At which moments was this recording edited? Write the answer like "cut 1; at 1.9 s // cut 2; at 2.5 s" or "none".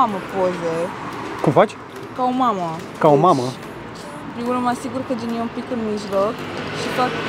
none